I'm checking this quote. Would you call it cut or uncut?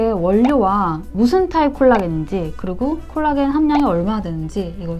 uncut